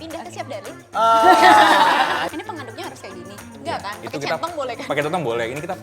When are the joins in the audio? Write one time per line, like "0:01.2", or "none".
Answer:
0:02.3